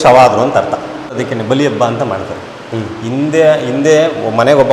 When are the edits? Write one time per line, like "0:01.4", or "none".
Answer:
0:01.2